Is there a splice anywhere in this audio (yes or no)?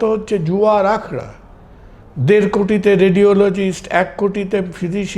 no